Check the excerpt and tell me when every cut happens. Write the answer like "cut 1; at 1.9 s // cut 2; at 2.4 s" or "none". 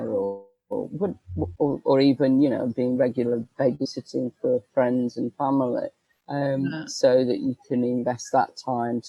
none